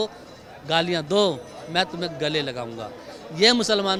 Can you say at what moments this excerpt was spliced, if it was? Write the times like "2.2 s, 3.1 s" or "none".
none